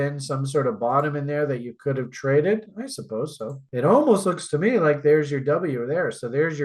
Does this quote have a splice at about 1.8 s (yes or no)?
no